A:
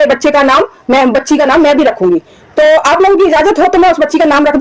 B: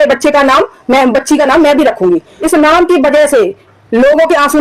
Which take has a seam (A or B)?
B